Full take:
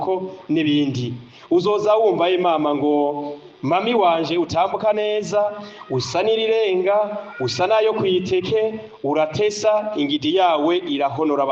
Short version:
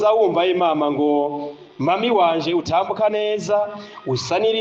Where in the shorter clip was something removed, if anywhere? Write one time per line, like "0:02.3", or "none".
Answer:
none